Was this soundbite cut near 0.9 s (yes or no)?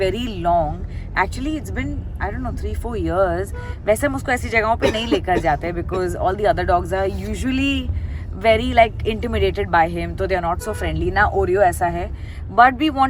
no